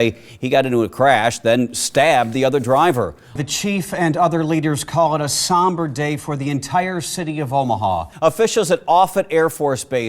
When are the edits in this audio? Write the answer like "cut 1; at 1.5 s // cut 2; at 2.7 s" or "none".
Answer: cut 1; at 3.4 s // cut 2; at 8.1 s